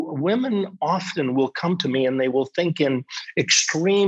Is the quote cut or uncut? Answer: uncut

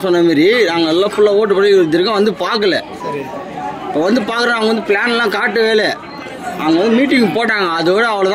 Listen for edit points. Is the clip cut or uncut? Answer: uncut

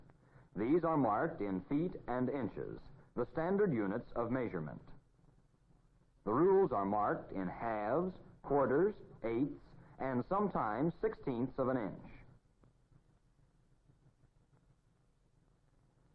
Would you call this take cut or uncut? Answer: cut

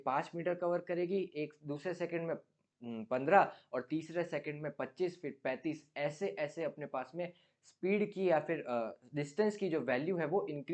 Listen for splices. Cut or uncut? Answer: uncut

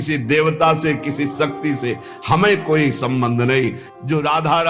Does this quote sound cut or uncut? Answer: cut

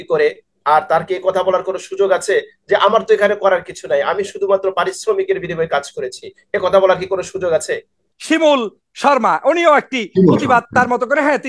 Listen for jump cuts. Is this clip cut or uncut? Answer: cut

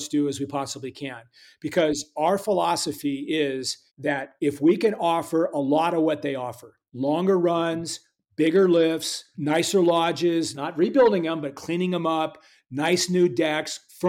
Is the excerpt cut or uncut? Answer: uncut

